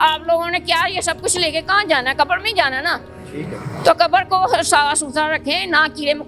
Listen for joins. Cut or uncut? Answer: uncut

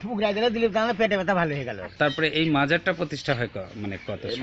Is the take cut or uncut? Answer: cut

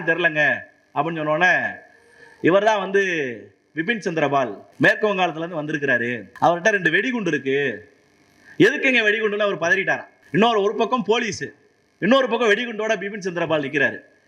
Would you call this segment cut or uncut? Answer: cut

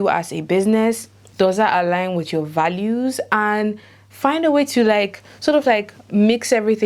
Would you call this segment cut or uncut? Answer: uncut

